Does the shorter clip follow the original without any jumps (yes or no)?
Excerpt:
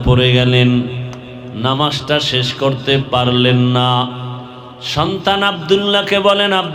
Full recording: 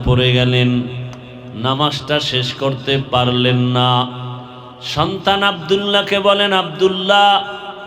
yes